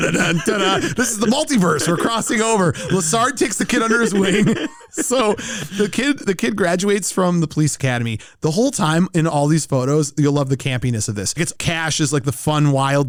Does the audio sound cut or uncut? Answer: uncut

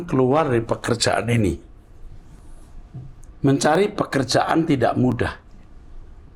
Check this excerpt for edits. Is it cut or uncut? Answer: uncut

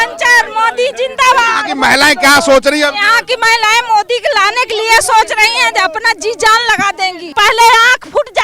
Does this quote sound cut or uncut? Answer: cut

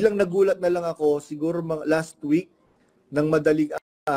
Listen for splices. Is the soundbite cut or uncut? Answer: uncut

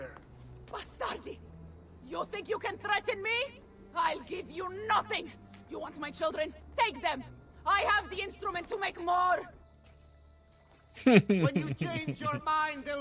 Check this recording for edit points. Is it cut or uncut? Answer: uncut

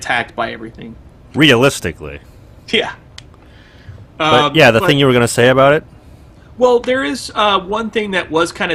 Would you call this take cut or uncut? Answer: uncut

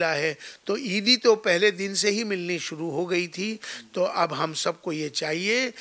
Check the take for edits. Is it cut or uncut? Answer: uncut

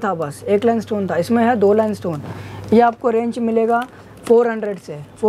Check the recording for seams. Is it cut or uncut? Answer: uncut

